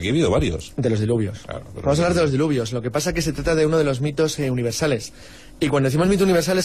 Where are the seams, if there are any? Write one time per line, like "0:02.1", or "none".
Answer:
0:04.0

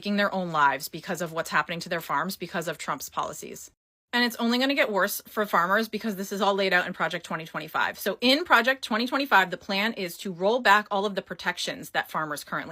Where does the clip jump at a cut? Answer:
none

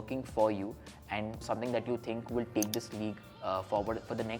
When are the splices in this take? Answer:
0:01.4

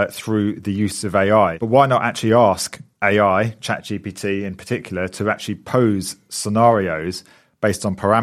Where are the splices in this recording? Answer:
0:01.6

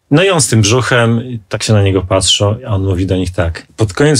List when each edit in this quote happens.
0:01.6

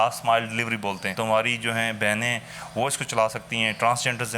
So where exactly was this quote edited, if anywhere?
0:01.1

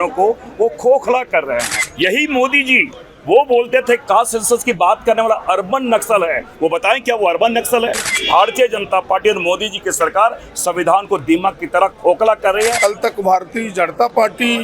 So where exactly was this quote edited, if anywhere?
0:01.8
0:08.1
0:12.8

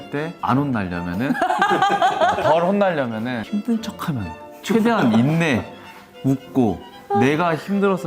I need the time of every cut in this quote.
0:03.4

